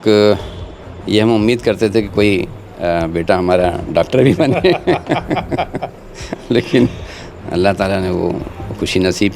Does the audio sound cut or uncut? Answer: uncut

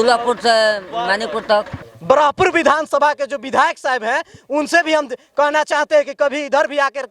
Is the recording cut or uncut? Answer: cut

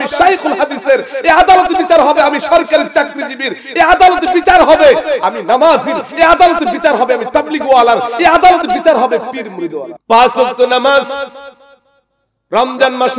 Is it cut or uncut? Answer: cut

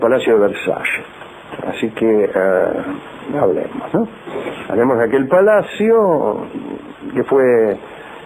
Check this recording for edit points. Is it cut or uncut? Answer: uncut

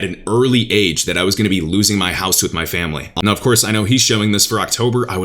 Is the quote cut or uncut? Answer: cut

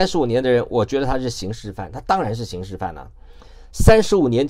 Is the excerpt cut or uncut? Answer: uncut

